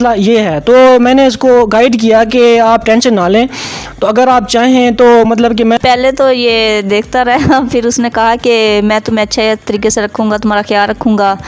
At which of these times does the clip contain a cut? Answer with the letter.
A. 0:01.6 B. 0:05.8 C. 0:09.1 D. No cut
B